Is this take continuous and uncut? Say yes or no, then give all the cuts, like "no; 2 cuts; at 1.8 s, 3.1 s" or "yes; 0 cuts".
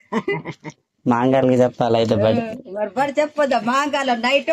yes; 0 cuts